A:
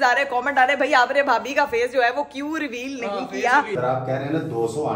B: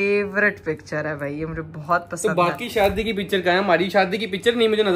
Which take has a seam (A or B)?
A